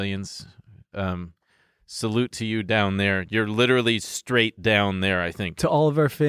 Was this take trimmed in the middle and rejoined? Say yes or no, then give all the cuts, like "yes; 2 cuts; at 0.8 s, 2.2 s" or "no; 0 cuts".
no; 0 cuts